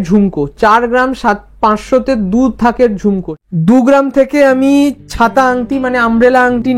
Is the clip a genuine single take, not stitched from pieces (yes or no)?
no